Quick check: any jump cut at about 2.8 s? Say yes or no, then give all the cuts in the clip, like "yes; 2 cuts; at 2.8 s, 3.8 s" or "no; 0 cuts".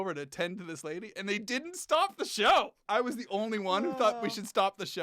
yes; 1 cut; at 2.8 s